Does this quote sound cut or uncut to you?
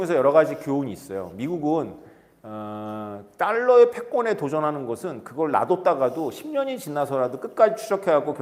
uncut